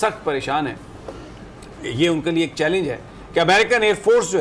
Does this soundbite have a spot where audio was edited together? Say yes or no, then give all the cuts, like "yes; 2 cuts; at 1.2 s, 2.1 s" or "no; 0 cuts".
no; 0 cuts